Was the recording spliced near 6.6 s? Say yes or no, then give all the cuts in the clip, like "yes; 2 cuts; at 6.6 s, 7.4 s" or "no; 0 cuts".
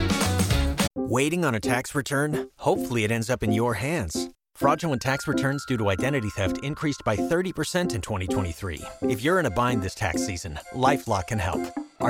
no; 1 cut; at 0.9 s